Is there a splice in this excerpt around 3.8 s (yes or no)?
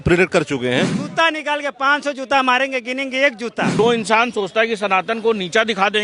yes